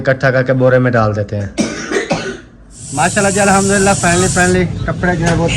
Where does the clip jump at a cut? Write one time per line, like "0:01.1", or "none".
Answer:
0:02.8